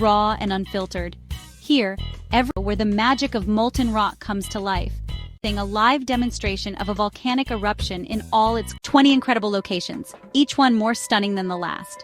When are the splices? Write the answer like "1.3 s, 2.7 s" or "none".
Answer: 2.5 s, 5.4 s, 8.8 s